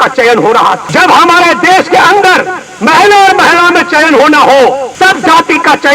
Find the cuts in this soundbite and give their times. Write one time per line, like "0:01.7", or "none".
0:00.8
0:04.9